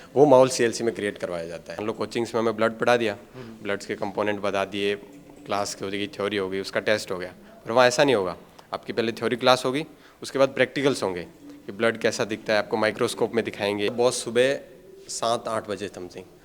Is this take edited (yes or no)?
yes